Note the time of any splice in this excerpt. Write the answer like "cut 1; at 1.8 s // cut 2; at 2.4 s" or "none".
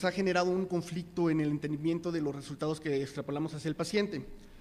cut 1; at 2.8 s